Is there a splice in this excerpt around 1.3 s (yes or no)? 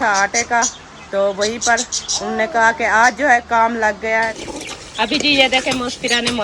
no